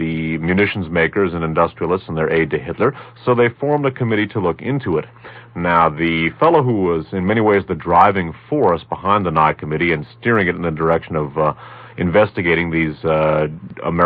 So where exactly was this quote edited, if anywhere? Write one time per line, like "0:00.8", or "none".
0:06.5